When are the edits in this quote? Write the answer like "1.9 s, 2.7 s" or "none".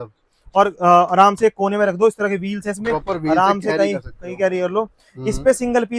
none